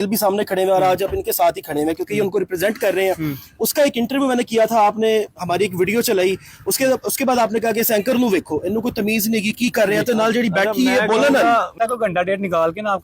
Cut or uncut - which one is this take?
cut